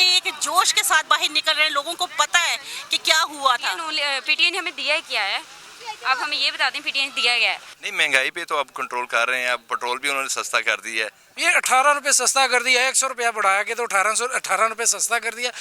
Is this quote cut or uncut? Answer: cut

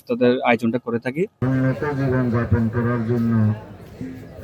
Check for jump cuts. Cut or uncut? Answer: cut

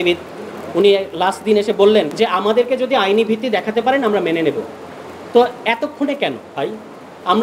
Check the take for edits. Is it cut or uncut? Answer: cut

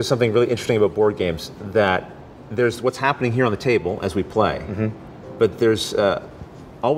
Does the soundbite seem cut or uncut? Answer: uncut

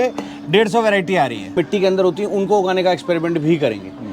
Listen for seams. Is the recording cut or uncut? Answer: cut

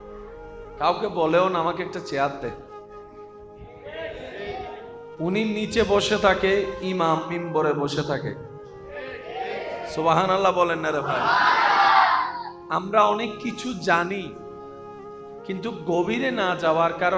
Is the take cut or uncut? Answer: cut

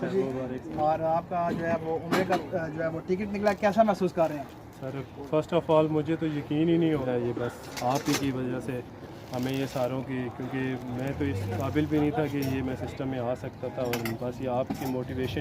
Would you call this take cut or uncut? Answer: cut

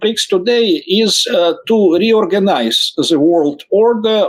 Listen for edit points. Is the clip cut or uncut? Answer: uncut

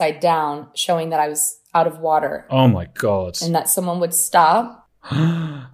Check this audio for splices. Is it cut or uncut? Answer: uncut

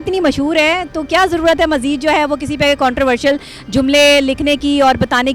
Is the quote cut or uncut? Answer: uncut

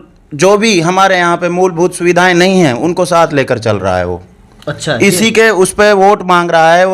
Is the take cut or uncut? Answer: uncut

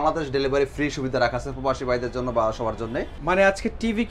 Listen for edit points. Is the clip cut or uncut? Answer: cut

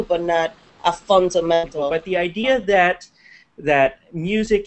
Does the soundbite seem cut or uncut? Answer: cut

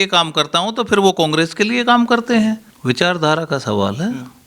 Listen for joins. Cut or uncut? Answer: cut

